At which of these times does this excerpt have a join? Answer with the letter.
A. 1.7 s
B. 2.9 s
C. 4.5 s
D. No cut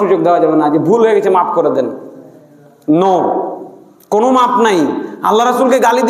D